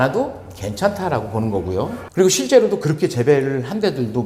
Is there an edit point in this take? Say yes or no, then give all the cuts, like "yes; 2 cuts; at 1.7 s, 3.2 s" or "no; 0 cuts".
no; 0 cuts